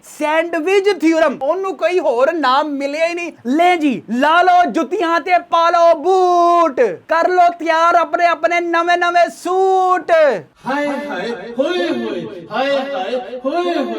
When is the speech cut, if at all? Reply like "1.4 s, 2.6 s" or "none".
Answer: 3.3 s, 10.5 s